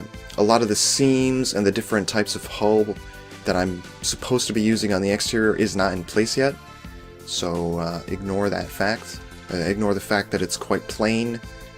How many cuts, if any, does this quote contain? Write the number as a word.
zero